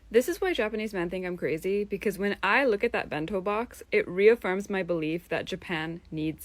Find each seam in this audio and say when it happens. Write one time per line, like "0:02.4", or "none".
none